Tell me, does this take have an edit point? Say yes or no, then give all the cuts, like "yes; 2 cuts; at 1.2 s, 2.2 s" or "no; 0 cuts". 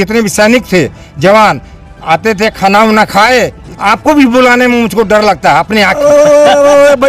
yes; 2 cuts; at 3.7 s, 6.0 s